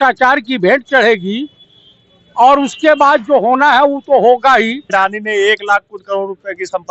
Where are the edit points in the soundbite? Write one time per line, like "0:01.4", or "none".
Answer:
0:04.9